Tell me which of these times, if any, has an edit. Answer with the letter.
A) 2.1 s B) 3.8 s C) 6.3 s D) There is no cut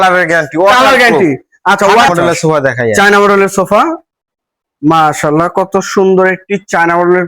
A